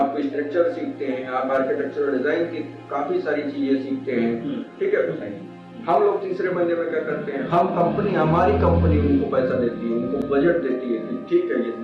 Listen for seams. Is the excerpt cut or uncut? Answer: cut